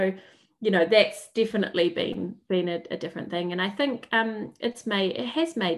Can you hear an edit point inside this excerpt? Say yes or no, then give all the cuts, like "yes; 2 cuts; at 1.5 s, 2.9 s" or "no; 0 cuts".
no; 0 cuts